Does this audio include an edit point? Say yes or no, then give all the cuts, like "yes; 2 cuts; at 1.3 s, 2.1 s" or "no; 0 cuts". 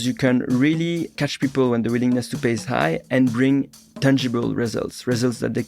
yes; 1 cut; at 1.2 s